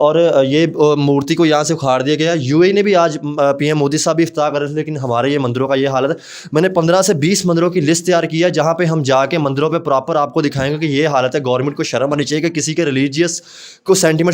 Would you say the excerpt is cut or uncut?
uncut